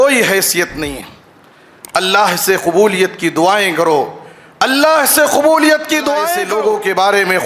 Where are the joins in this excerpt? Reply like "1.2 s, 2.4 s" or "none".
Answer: 6.4 s